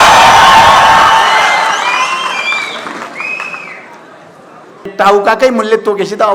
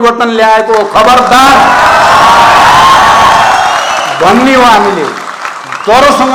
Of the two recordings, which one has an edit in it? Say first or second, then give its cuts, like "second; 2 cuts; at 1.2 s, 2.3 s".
first; 1 cut; at 4.9 s